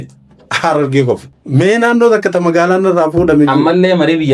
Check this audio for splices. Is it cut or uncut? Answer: cut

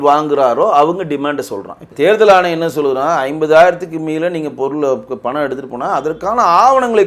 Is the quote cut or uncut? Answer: cut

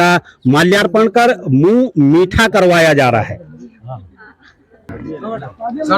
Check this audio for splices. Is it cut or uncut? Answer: cut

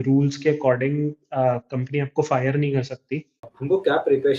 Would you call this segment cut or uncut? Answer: cut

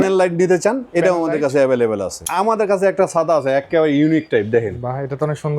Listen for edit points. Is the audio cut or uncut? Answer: cut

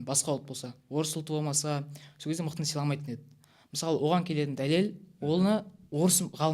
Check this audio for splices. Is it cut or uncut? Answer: uncut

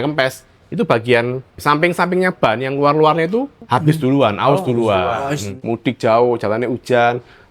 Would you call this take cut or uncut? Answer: cut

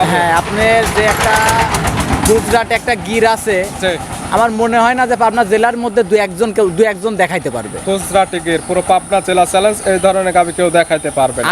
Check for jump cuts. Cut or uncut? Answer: uncut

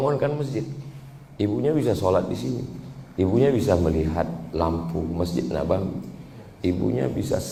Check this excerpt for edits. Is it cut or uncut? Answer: uncut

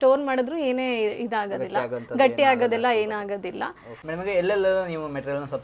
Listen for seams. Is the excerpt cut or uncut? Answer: uncut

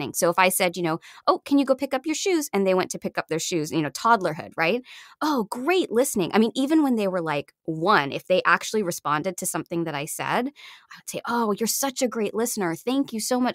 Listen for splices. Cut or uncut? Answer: uncut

